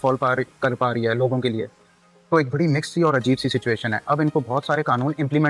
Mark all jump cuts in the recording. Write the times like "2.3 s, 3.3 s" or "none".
none